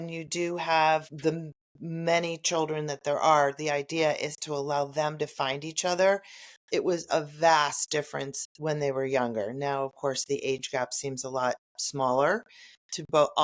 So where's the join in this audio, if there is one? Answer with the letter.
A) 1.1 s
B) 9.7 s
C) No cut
A